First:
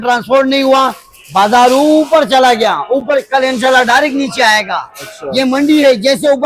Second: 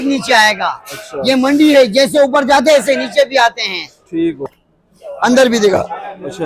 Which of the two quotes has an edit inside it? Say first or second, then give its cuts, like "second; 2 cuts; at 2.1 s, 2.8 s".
second; 1 cut; at 4.5 s